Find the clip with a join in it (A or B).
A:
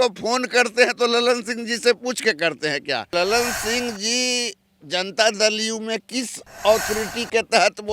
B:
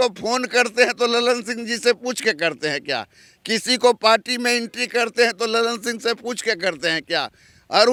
A